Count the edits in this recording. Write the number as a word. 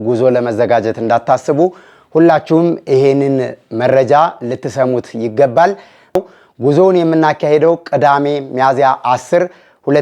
one